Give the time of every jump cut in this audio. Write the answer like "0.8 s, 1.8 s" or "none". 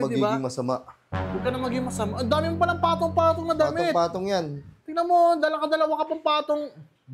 none